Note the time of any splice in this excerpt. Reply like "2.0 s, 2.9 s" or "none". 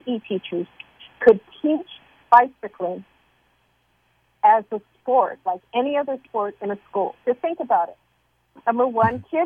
none